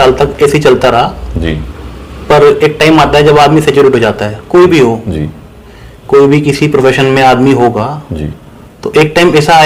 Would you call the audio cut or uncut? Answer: uncut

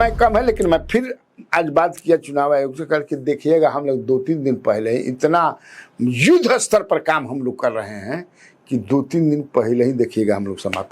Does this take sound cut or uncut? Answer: uncut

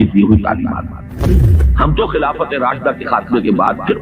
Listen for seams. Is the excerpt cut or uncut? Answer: cut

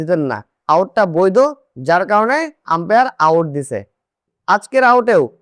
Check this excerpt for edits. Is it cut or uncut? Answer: cut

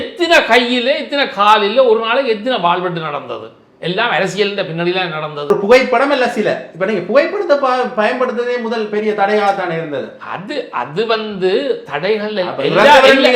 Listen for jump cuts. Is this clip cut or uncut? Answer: cut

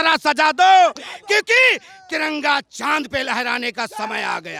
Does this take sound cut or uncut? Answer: uncut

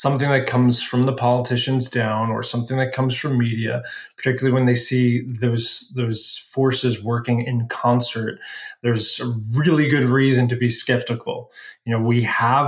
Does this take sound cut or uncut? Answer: uncut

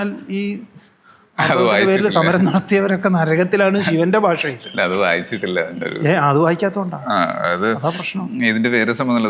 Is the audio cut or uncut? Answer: uncut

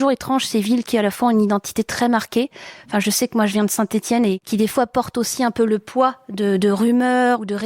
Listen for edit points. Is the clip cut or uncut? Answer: cut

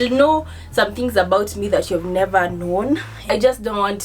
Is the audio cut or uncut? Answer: cut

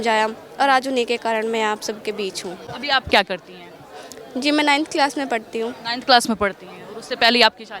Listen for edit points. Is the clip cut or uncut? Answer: uncut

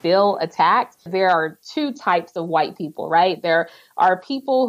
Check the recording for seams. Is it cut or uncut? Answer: cut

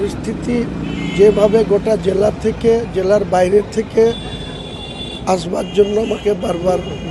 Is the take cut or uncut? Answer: uncut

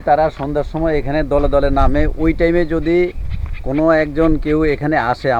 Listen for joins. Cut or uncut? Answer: uncut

